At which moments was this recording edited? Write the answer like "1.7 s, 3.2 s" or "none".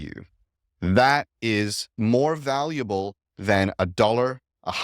1.9 s